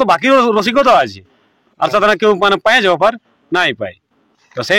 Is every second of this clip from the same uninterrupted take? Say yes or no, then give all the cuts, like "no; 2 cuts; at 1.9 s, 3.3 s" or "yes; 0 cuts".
yes; 0 cuts